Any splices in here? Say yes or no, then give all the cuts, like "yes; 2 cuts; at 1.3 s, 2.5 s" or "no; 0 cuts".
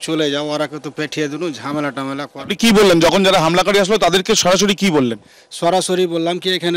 no; 0 cuts